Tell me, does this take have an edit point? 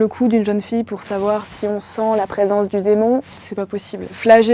no; 0 cuts

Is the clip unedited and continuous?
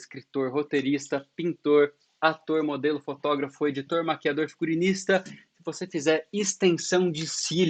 yes; 0 cuts

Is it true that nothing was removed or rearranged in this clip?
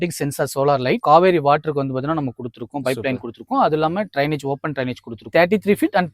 no; 2 cuts; at 1.0 s, 5.3 s

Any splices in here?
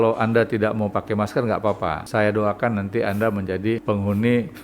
yes; 2 cuts; at 2.0 s, 3.8 s

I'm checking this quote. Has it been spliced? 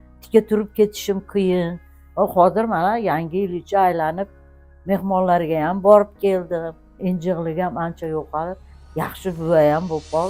yes; 1 cut; at 7.0 s

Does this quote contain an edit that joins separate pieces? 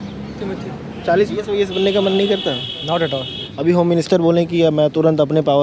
yes; 2 cuts; at 1.3 s, 3.4 s

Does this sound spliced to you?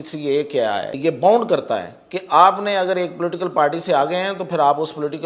yes; 1 cut; at 0.9 s

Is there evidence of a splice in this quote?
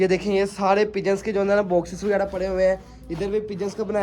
no; 0 cuts

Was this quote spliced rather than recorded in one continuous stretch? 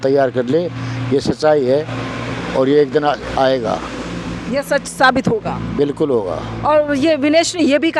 no; 0 cuts

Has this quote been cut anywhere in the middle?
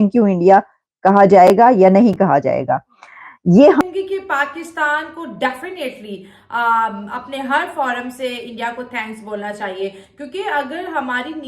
yes; 1 cut; at 3.8 s

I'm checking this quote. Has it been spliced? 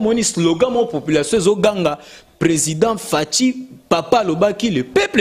no; 0 cuts

